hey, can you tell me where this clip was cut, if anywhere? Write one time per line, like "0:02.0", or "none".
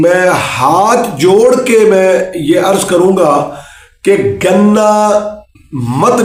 none